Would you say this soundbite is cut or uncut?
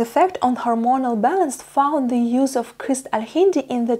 uncut